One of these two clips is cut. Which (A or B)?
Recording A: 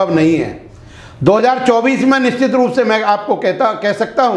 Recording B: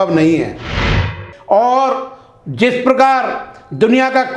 B